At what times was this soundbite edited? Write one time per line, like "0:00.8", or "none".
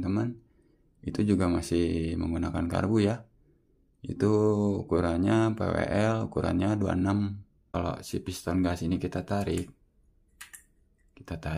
0:07.7